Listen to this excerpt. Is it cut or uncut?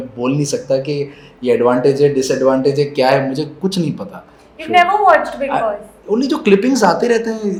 uncut